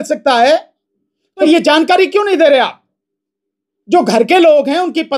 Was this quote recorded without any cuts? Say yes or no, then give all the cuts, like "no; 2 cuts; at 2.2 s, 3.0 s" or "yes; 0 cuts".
no; 1 cut; at 1.5 s